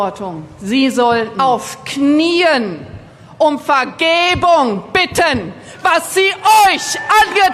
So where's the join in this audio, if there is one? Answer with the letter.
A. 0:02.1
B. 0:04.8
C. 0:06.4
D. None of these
D